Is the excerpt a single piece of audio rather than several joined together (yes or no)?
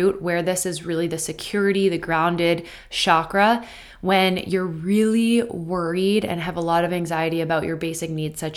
yes